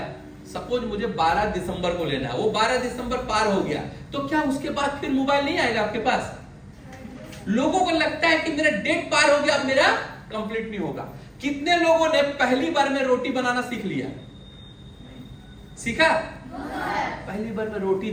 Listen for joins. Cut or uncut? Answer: uncut